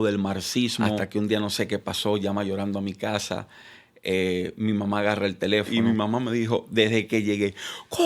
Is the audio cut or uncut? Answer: cut